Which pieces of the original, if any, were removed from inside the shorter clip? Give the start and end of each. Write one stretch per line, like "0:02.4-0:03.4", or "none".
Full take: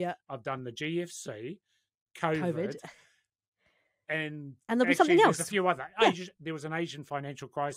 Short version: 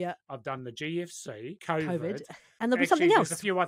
0:01.6-0:02.1
0:02.9-0:04.5